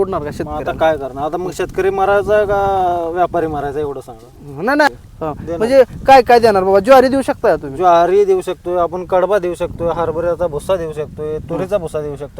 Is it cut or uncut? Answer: cut